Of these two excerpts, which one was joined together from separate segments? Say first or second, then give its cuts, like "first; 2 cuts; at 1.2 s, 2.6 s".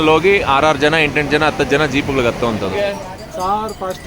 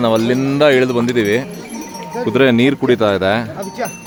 first; 1 cut; at 2.8 s